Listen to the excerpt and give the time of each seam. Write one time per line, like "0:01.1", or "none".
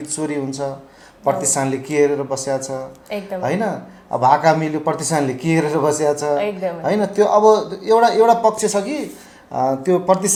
none